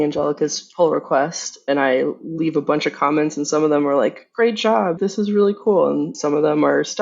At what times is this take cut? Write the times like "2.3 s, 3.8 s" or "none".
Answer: 5.0 s, 6.2 s